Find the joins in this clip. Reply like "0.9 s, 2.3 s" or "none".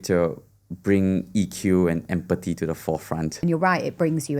3.4 s

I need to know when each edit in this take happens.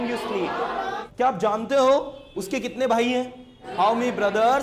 1.0 s, 3.6 s

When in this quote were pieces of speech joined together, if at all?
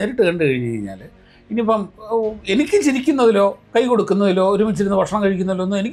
none

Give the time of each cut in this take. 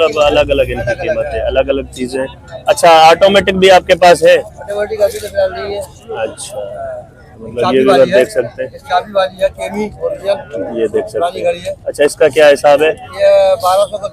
none

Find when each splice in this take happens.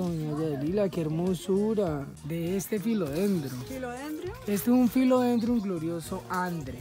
2.1 s

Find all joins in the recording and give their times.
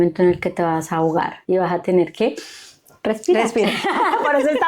1.4 s

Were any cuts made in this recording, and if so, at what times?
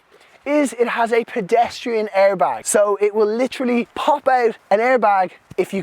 2.6 s, 4.1 s

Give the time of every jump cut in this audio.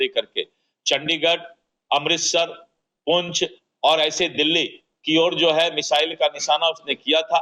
none

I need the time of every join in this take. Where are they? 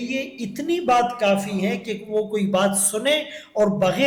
none

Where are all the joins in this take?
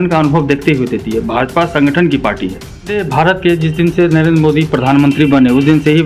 3.0 s

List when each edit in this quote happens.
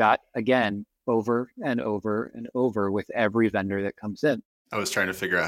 4.6 s

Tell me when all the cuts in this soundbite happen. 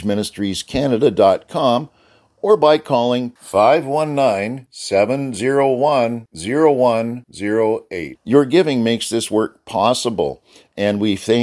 none

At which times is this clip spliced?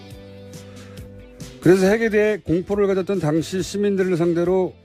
3.3 s

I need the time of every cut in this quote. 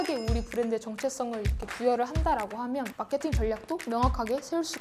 none

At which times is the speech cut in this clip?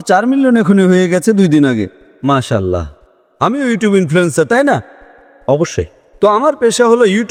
none

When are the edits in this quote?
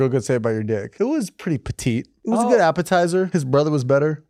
0.9 s, 2.1 s, 3.4 s

